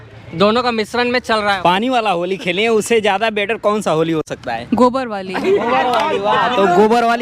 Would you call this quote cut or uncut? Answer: cut